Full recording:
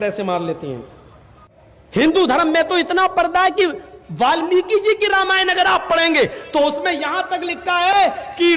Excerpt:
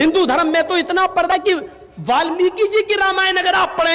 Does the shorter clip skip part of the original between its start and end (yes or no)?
yes